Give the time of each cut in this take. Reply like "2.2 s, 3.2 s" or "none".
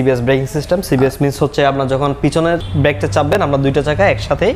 2.7 s